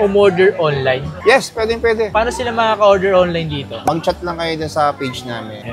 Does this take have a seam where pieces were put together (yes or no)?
no